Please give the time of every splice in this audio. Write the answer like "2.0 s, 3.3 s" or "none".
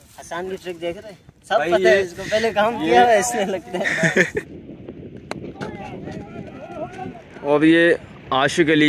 4.5 s, 7.1 s